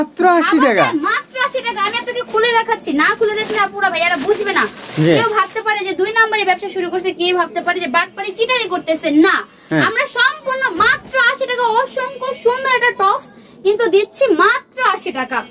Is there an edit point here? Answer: no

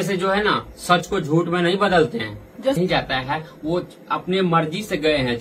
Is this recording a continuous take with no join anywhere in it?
no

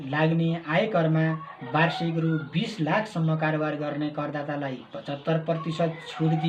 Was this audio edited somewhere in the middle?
no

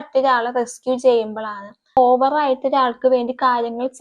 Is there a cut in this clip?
yes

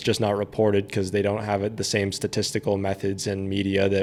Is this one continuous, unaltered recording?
yes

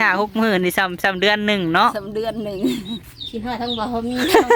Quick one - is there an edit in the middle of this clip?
yes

